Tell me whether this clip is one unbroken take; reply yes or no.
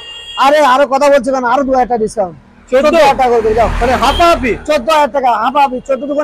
yes